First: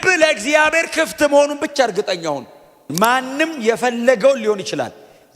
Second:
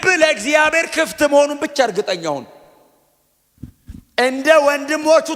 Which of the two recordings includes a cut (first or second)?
first